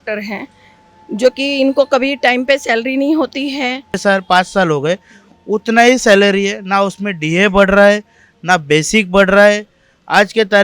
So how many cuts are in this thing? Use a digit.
1